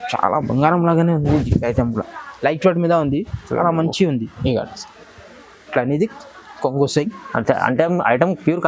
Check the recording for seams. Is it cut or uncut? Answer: cut